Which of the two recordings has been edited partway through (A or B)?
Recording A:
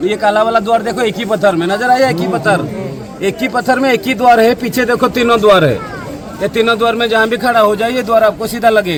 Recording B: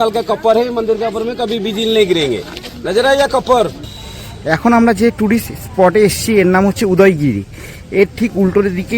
B